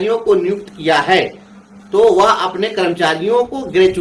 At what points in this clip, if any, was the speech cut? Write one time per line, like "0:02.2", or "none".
none